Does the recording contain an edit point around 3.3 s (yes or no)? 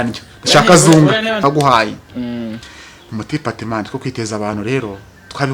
no